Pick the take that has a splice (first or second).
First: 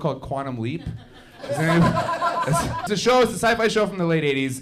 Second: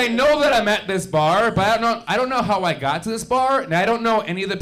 first